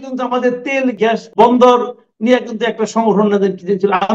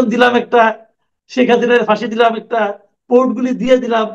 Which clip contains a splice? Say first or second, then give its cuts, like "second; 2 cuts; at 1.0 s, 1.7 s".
first; 1 cut; at 1.0 s